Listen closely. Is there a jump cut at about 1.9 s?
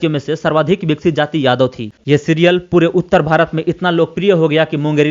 yes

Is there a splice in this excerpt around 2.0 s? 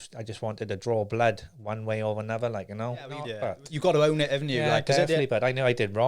no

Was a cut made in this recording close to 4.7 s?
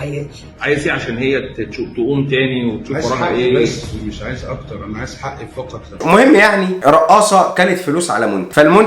no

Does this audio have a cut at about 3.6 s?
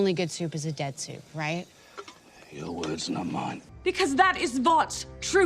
yes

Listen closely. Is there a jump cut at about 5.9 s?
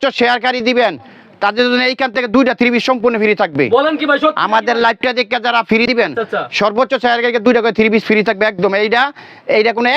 yes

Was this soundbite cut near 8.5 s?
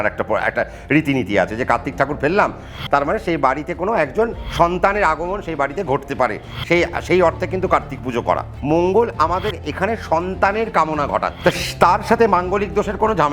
yes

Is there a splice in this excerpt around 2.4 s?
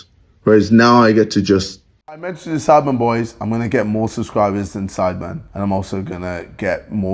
yes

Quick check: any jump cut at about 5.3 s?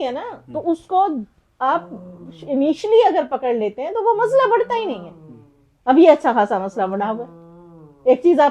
no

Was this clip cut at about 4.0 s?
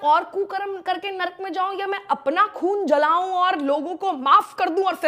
no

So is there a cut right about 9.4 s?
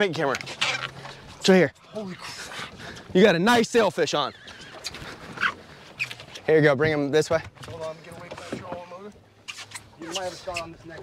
no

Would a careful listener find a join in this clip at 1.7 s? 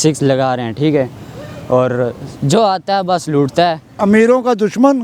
no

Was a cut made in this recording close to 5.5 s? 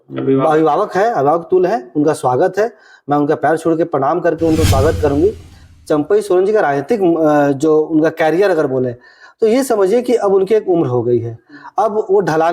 yes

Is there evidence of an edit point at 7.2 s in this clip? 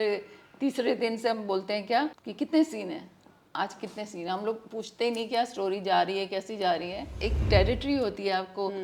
yes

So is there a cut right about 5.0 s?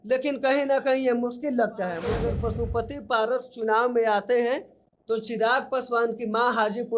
no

